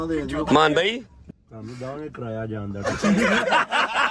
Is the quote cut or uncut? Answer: cut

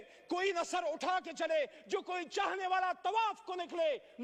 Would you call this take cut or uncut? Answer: uncut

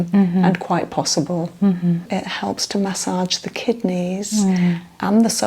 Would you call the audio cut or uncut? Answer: cut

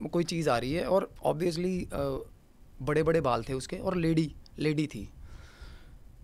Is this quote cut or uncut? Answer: uncut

